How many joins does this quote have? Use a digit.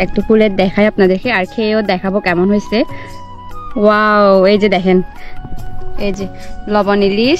1